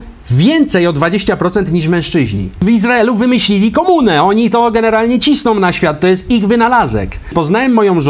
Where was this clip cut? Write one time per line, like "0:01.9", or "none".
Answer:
0:02.6
0:07.3